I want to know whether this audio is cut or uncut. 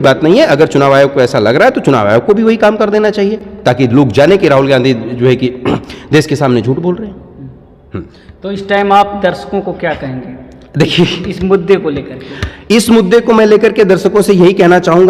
uncut